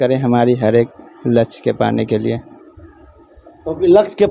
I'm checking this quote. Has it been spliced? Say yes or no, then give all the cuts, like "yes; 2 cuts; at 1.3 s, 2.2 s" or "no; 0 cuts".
no; 0 cuts